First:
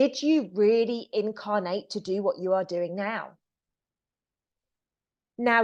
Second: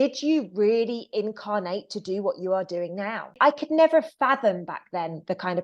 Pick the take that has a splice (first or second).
second